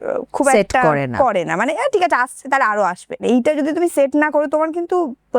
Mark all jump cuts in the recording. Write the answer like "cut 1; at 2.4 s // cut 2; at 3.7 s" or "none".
cut 1; at 3.2 s